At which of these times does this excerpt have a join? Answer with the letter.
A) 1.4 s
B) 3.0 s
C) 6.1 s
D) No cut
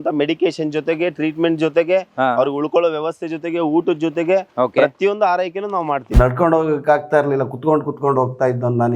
C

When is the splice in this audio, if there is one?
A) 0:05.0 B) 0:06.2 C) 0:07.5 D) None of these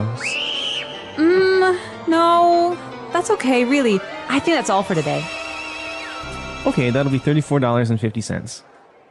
B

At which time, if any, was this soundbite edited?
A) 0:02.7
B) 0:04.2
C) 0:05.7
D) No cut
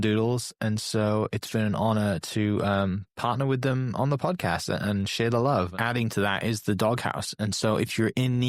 C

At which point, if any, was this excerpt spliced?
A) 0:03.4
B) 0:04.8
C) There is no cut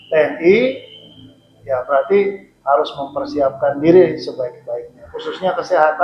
C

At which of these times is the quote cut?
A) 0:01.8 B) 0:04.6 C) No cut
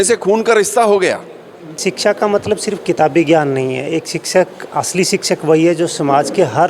A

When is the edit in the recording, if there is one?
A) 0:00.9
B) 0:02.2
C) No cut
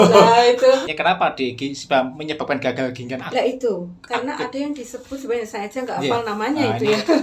A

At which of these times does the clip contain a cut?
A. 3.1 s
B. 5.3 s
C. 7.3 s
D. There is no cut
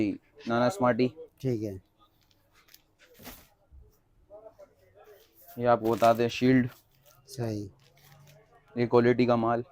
A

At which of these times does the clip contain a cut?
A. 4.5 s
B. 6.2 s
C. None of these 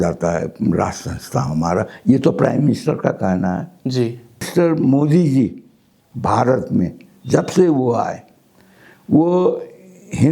A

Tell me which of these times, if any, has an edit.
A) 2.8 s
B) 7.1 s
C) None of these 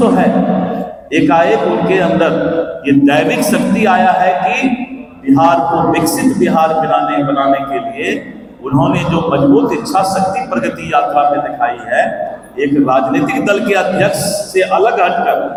C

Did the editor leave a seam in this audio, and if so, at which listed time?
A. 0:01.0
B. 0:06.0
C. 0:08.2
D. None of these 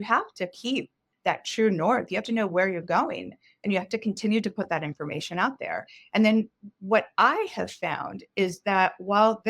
A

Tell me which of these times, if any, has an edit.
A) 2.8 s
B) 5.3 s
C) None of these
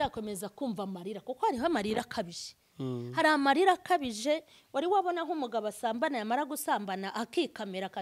C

